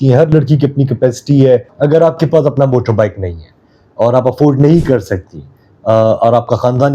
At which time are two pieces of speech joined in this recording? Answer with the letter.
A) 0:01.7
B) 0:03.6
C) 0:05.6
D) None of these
A